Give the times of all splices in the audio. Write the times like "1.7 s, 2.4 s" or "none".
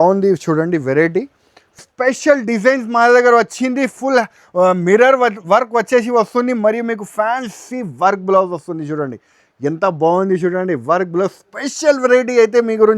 1.8 s